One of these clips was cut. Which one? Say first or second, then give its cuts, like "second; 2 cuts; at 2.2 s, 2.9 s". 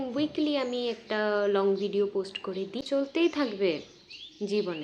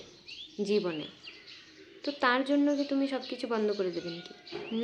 first; 1 cut; at 2.8 s